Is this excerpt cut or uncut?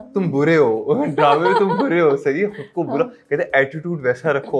uncut